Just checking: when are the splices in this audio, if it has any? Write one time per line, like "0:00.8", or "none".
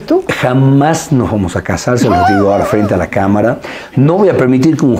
none